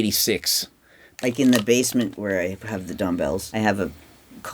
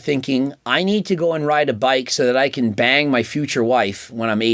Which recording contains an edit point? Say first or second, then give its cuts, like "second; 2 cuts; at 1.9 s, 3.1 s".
first; 3 cuts; at 1.1 s, 2.2 s, 3.5 s